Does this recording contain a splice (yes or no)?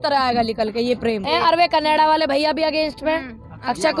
yes